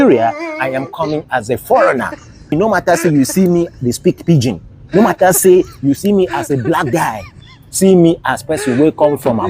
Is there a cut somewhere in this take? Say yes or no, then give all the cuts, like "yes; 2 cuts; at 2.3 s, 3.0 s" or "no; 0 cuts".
yes; 1 cut; at 2.5 s